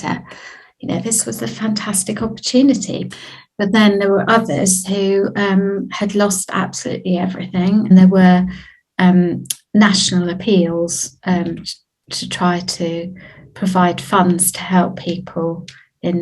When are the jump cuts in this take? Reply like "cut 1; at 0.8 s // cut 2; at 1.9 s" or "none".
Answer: cut 1; at 3.1 s // cut 2; at 7.9 s